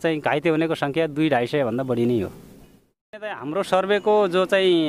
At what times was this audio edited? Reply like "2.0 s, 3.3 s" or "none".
3.0 s

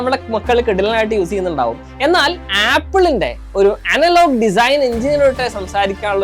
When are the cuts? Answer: none

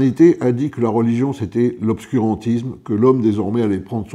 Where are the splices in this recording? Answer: none

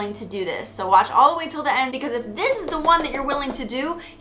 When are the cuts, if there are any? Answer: 1.9 s

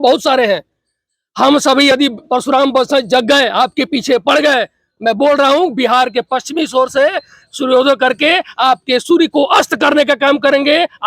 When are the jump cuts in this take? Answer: none

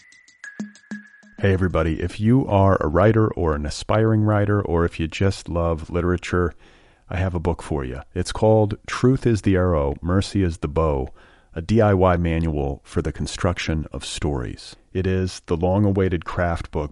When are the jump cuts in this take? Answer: 0.9 s

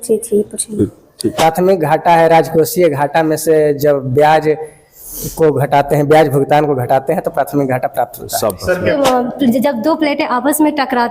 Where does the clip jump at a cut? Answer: 1.2 s, 8.9 s

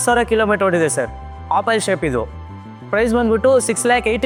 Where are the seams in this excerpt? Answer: none

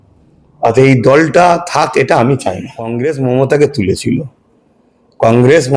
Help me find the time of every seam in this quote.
2.9 s

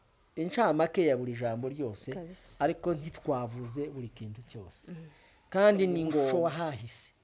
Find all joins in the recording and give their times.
6.3 s

